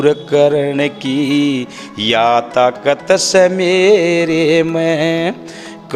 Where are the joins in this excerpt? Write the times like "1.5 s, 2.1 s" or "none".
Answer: none